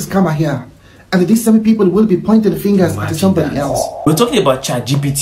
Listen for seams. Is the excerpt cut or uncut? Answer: cut